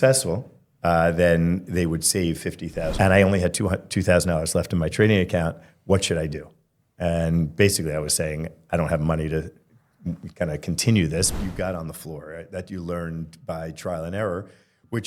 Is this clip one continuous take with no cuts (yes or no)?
no